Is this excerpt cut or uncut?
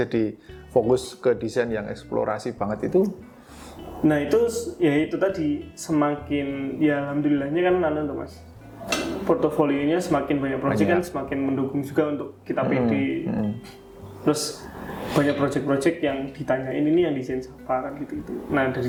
uncut